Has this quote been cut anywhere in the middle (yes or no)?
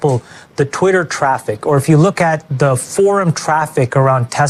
no